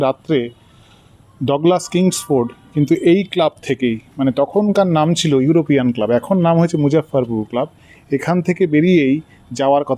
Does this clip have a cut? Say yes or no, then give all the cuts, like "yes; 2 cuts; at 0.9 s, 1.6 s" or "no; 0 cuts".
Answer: no; 0 cuts